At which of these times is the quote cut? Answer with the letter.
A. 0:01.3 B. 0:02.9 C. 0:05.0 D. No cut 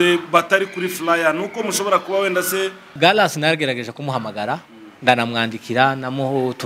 B